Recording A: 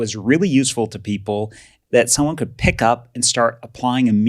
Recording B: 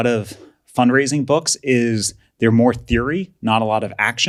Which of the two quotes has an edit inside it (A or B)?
A